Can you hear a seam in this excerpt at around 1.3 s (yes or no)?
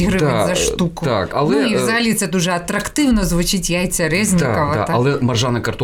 yes